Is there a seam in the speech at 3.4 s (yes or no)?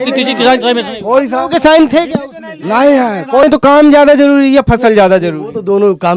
yes